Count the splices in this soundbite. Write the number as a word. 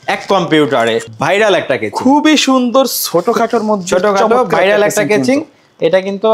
one